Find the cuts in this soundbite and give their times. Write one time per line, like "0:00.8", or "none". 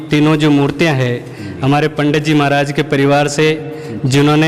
none

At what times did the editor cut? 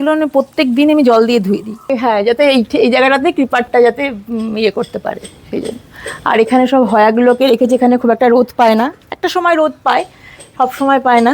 0:01.9

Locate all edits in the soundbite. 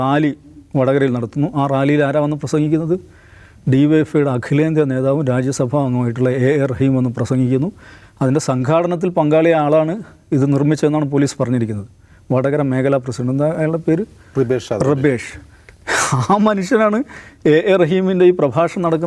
none

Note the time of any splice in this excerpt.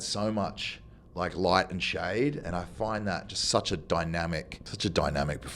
0:04.6

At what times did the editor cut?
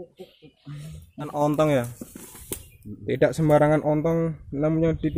0:01.3

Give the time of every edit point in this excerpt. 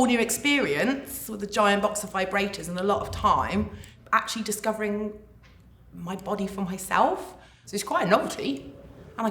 0:07.7

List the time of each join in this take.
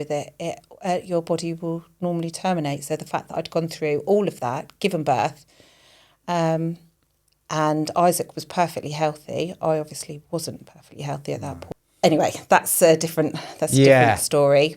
0:11.6

